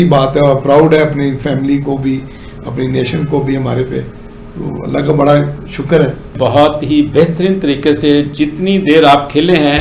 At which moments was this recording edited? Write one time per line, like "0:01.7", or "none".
0:06.3